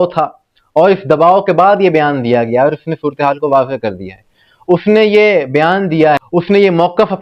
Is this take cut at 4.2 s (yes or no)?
no